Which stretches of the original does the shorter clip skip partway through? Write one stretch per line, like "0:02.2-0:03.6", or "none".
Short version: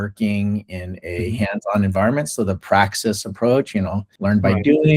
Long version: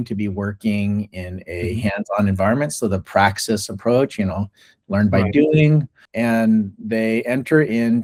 0:04.5-0:04.7